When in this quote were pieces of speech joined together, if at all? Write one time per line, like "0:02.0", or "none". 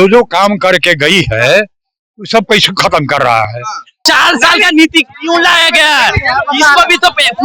0:04.0